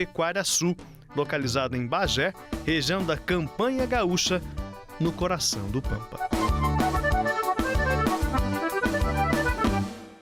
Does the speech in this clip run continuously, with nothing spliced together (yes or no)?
yes